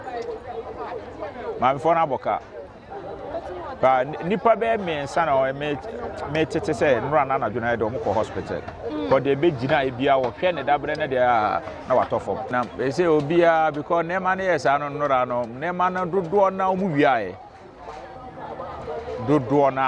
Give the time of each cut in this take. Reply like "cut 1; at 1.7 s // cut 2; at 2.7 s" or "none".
cut 1; at 12.5 s